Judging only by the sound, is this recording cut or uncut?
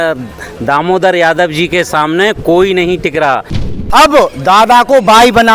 cut